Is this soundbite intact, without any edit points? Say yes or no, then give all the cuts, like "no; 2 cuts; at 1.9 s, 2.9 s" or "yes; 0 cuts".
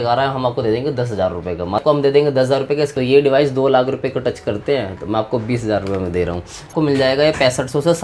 no; 3 cuts; at 1.8 s, 2.9 s, 6.7 s